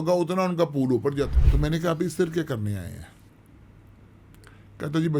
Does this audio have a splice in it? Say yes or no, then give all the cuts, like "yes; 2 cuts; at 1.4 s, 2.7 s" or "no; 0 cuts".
yes; 1 cut; at 1.4 s